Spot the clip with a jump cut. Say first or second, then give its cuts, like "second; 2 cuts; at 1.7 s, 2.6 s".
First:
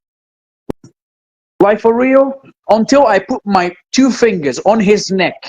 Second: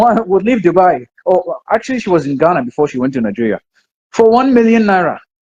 first; 1 cut; at 2.5 s